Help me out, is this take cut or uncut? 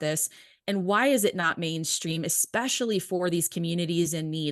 uncut